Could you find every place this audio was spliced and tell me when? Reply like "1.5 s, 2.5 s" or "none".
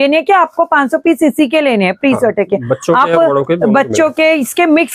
none